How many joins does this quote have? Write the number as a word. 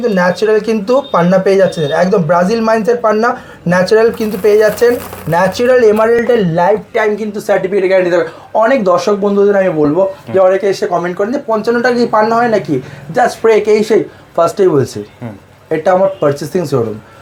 zero